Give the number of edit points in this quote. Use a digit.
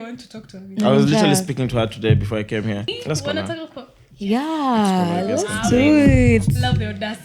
1